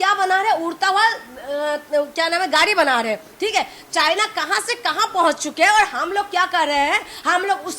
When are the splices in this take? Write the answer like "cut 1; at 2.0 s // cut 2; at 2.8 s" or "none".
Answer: none